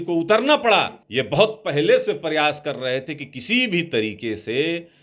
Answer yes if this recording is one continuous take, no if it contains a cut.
no